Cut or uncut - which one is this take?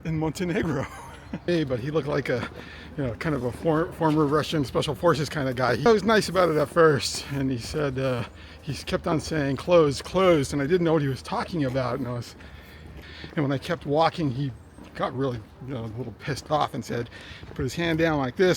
cut